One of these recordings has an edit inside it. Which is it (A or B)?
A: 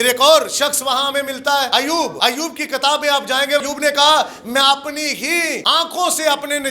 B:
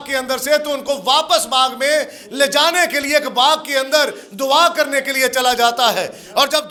A